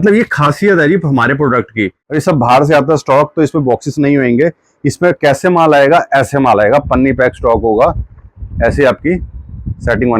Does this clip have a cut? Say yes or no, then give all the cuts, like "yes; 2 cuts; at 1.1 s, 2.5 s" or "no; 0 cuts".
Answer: yes; 1 cut; at 2.0 s